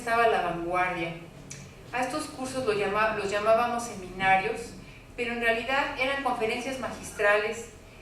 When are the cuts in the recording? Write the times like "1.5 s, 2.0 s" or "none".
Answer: 3.2 s